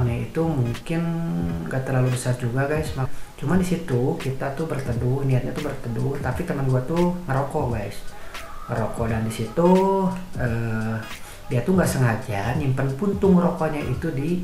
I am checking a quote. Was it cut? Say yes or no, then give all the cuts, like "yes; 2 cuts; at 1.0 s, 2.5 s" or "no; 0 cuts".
no; 0 cuts